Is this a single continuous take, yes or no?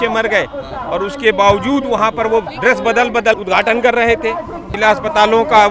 no